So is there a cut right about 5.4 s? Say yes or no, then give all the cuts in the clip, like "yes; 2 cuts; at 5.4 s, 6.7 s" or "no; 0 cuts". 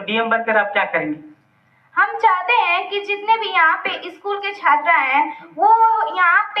yes; 1 cut; at 5.4 s